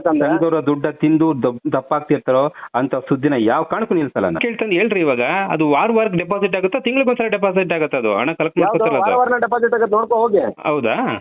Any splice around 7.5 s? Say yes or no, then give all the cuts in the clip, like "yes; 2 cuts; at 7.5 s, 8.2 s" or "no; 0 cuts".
no; 1 cut; at 4.4 s